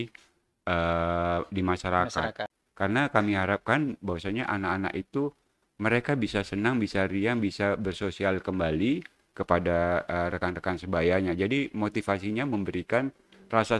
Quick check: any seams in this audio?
yes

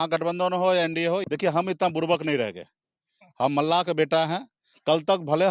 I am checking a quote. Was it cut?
yes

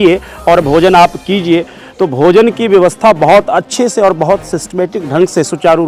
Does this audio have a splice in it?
no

